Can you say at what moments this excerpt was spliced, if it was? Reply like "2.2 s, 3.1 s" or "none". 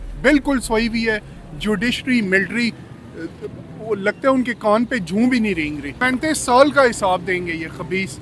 6.0 s